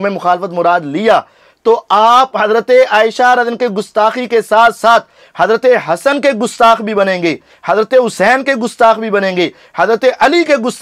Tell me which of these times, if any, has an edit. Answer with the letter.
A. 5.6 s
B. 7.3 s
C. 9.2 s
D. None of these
D